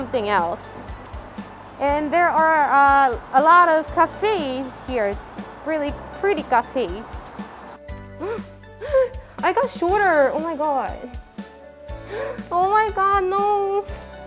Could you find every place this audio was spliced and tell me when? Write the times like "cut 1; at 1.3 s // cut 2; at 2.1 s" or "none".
cut 1; at 7.5 s